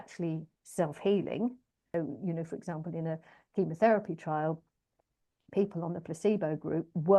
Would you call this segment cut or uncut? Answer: cut